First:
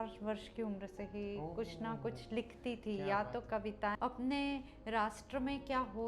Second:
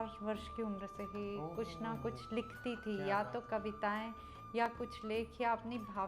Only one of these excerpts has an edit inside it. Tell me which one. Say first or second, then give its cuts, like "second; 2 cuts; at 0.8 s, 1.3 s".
first; 1 cut; at 4.0 s